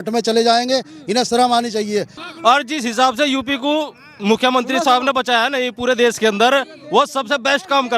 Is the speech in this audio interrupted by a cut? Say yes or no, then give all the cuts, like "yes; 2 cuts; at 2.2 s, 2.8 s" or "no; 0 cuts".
yes; 1 cut; at 2.2 s